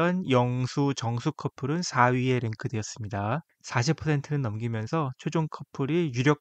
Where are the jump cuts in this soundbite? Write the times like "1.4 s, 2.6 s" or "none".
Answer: 3.6 s